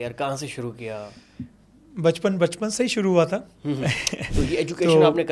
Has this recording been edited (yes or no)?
no